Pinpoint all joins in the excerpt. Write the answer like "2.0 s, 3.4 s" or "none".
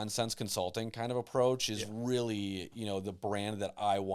none